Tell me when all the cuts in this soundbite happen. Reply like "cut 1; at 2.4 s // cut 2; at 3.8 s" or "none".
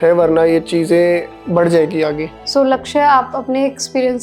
cut 1; at 2.4 s

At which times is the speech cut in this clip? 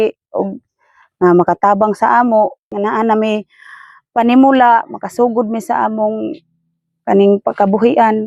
cut 1; at 2.7 s

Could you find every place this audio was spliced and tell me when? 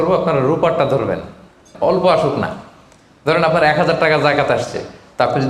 cut 1; at 1.7 s

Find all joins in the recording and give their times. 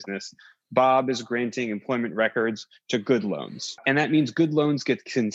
cut 1; at 3.8 s

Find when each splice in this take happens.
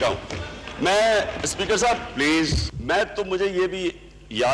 cut 1; at 2.7 s

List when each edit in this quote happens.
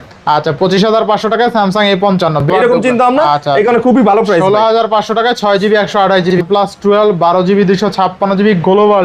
cut 1; at 2.4 s // cut 2; at 6.4 s

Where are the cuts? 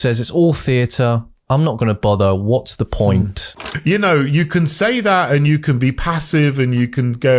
cut 1; at 3.6 s

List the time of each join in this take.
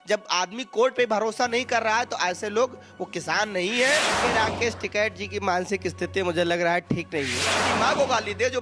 cut 1; at 4.1 s // cut 2; at 7.6 s

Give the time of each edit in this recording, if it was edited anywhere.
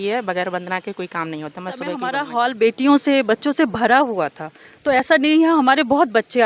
cut 1; at 2.1 s

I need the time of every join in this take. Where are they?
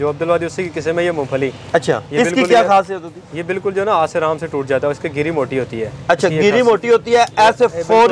none

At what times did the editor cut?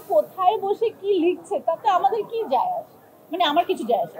none

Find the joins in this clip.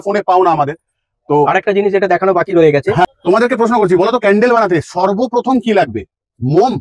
cut 1; at 3.1 s

